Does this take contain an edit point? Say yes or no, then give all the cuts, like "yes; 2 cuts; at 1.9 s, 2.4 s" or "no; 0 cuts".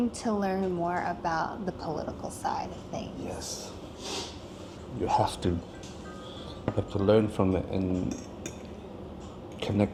no; 0 cuts